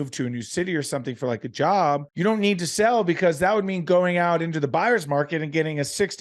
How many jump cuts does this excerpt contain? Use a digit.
1